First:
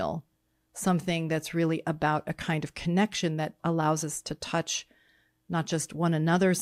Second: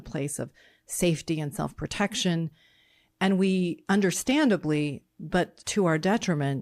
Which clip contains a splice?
second; 2 cuts; at 3.8 s, 5.6 s

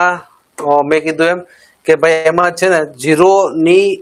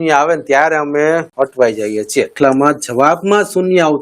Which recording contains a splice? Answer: second; 2 cuts; at 1.3 s, 2.3 s

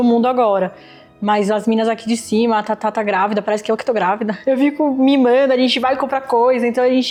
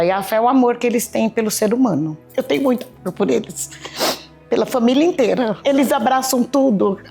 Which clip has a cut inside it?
second; 2 cuts; at 2.2 s, 5.6 s

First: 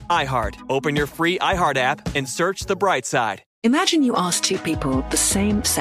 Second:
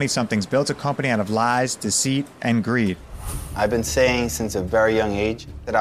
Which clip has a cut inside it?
first; 1 cut; at 3.5 s

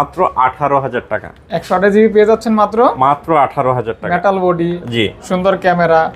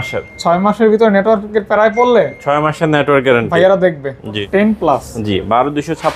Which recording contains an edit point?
second; 1 cut; at 4.4 s

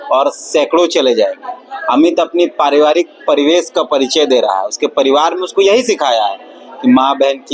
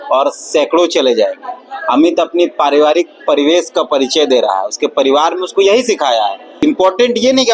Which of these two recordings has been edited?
second; 1 cut; at 6.6 s

